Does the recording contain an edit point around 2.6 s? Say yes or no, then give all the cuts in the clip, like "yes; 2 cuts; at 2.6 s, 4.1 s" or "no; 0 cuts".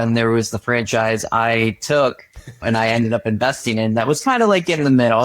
yes; 1 cut; at 2.6 s